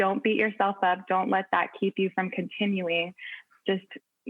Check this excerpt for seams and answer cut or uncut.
uncut